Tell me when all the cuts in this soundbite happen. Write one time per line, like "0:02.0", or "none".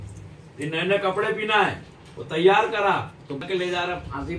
0:03.4